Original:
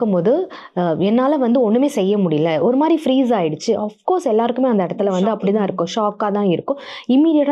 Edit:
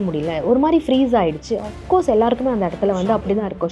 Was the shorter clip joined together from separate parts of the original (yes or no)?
no